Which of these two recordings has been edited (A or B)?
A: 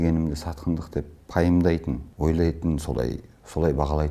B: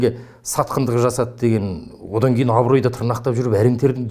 A